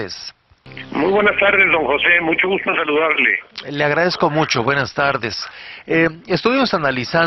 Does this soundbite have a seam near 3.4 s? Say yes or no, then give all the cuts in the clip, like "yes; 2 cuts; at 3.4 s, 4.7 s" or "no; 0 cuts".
yes; 1 cut; at 3.4 s